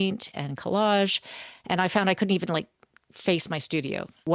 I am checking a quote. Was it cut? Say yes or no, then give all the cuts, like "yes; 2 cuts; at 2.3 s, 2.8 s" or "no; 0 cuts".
no; 0 cuts